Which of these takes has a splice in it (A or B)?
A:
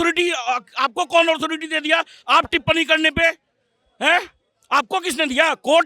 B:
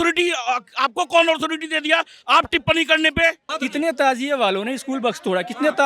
B